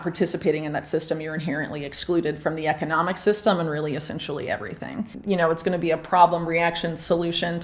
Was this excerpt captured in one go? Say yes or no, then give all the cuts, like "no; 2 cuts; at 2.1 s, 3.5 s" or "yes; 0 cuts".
no; 1 cut; at 5.1 s